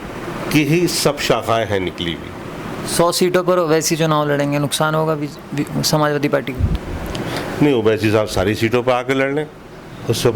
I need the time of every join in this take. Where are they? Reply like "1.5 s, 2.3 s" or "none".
2.7 s